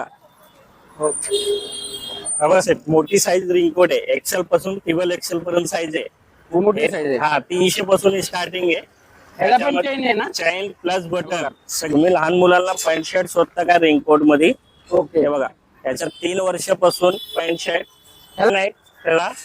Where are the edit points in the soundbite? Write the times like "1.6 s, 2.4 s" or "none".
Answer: 1.3 s, 11.9 s, 18.5 s